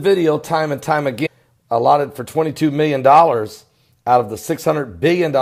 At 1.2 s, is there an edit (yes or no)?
no